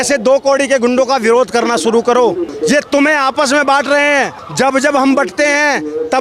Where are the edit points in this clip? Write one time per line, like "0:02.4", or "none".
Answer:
0:02.5
0:04.4